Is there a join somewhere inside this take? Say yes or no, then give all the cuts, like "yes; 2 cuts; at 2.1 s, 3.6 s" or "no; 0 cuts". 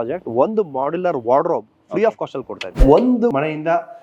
yes; 1 cut; at 2.8 s